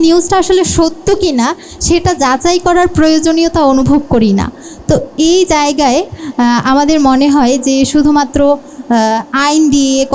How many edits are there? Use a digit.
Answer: 0